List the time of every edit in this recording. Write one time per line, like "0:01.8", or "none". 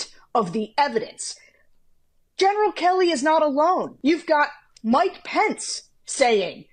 0:03.9